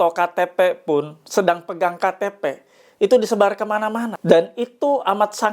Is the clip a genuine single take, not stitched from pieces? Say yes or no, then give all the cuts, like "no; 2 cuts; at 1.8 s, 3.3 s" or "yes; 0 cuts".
no; 1 cut; at 4.1 s